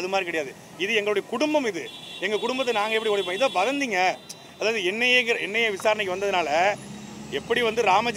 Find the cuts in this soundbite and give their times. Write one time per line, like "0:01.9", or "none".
none